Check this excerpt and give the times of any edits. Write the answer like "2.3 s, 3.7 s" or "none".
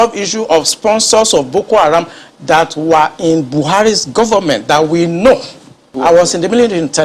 5.9 s